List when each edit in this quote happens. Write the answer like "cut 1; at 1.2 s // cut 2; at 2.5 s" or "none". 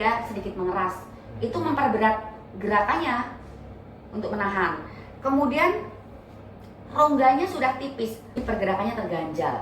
cut 1; at 8.4 s